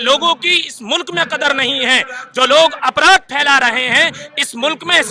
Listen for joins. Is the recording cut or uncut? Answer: uncut